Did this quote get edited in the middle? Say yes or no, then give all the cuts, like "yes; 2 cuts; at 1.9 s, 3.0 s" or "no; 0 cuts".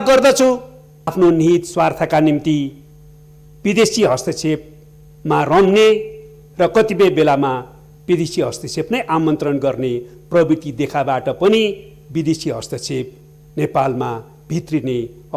yes; 1 cut; at 1.1 s